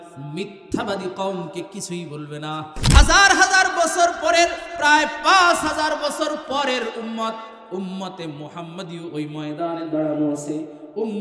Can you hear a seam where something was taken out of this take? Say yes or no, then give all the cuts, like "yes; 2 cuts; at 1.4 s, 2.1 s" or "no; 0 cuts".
yes; 1 cut; at 2.8 s